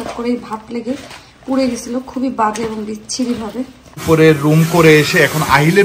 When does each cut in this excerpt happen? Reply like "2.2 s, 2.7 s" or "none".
4.0 s